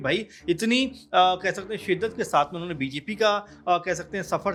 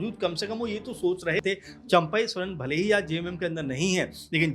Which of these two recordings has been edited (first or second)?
second